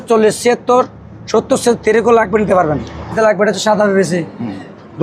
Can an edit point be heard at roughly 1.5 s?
no; 1 cut; at 3.1 s

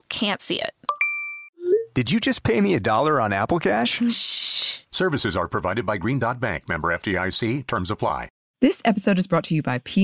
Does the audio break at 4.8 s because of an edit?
no; 1 cut; at 8.4 s

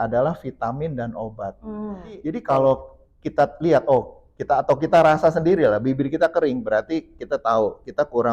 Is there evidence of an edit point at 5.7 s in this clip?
no; 1 cut; at 2.4 s

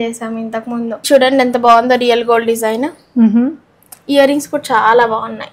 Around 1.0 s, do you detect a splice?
yes; 1 cut; at 1.0 s

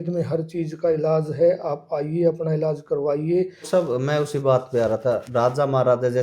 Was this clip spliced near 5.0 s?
no; 1 cut; at 3.7 s

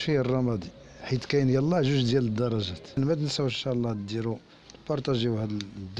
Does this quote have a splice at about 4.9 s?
no; 1 cut; at 3.0 s

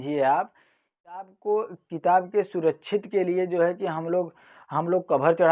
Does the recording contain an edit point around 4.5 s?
no; 1 cut; at 1.3 s

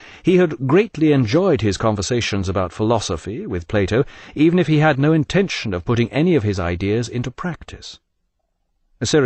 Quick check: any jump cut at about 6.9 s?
yes; 1 cut; at 6.9 s

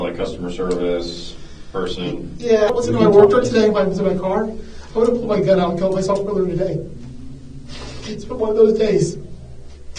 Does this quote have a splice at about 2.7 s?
yes; 1 cut; at 2.7 s

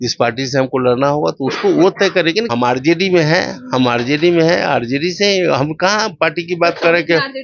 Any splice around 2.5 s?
yes; 1 cut; at 2.5 s

